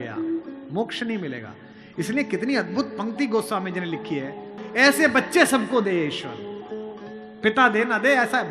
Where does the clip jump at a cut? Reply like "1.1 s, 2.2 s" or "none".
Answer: 4.5 s